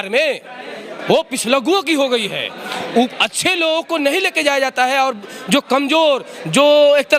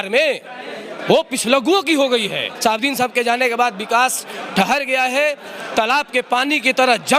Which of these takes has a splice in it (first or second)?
second